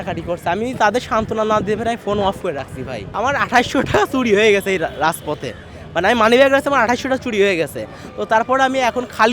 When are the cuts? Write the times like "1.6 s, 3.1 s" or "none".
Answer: 3.0 s